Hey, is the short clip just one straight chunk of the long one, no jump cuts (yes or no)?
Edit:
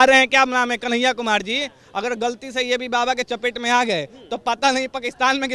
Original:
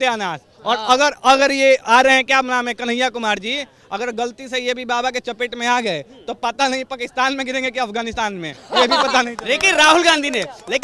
yes